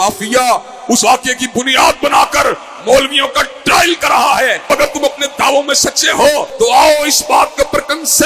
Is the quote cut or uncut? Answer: cut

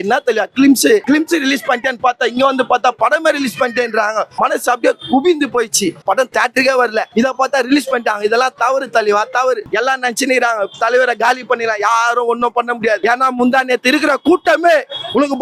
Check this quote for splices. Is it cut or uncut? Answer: cut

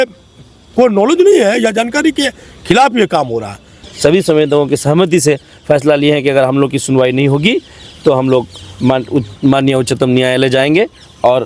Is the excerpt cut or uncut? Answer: cut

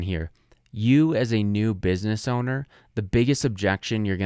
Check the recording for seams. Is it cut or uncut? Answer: uncut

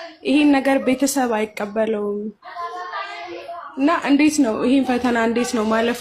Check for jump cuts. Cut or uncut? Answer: uncut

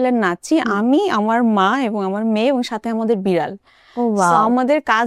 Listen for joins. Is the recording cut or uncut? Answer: uncut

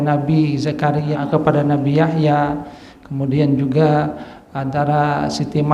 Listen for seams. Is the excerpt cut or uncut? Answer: cut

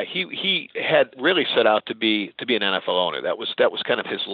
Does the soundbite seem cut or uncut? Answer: cut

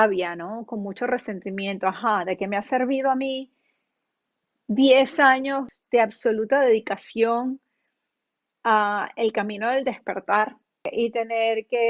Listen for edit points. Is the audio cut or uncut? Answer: cut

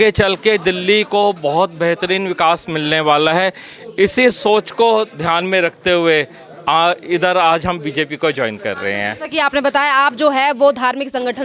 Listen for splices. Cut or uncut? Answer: uncut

